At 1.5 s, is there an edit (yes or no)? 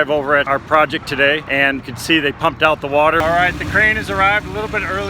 no